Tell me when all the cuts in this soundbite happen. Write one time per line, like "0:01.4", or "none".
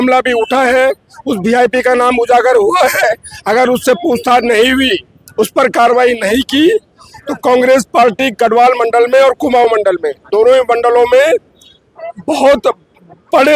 none